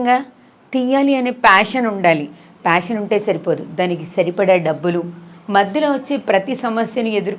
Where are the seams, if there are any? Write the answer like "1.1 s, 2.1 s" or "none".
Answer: none